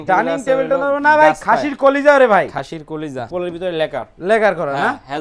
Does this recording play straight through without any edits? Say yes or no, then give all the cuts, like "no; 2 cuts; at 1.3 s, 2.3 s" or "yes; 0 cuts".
no; 1 cut; at 3.2 s